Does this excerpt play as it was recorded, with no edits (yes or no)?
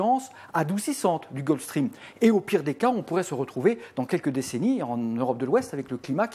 no